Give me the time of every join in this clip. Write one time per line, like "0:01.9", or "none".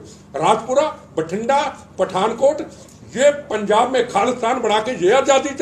none